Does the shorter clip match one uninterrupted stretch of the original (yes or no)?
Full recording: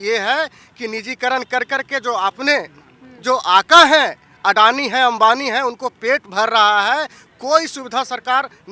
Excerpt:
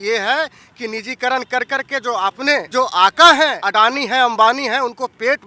no